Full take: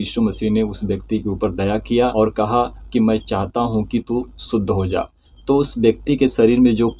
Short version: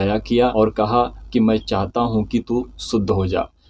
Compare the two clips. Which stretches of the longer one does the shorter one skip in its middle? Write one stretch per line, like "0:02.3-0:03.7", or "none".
none